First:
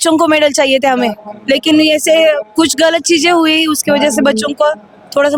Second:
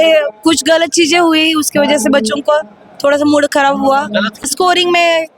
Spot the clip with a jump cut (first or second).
second